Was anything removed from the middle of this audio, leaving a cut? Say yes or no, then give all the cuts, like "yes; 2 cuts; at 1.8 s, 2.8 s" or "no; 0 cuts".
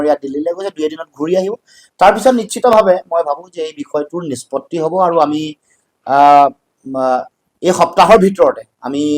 no; 0 cuts